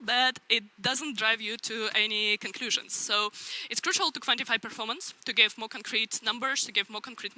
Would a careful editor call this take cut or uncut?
uncut